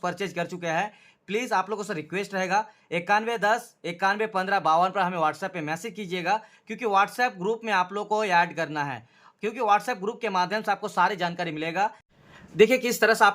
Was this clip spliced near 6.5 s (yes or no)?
no